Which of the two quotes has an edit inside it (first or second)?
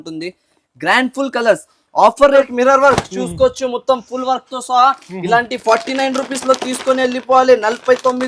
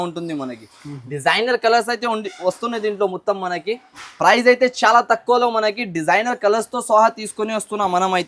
first